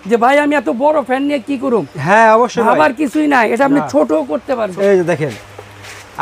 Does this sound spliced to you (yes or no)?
yes